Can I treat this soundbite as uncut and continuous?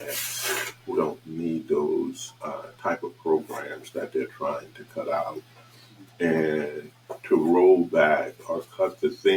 yes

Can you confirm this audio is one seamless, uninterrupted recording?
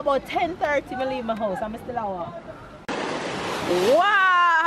no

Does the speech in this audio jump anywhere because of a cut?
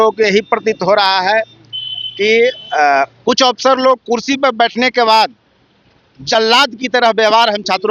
no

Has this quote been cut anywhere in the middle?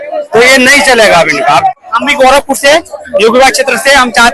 yes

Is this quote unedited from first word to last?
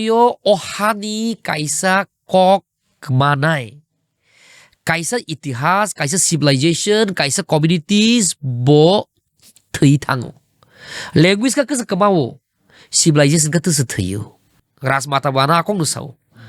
no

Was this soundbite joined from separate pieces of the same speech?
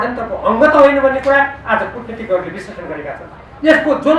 no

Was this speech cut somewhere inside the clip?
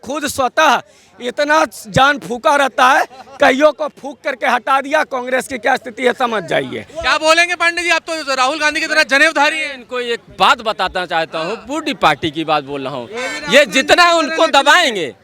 no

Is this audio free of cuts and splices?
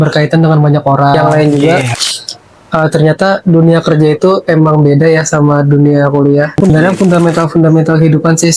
no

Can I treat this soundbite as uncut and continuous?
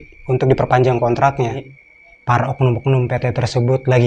no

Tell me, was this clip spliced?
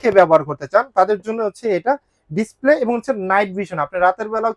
no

